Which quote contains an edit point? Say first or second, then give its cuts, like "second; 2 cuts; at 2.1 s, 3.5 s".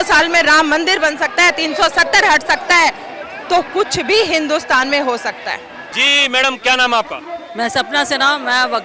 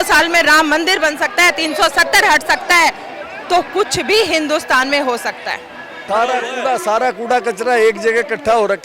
second; 1 cut; at 5.9 s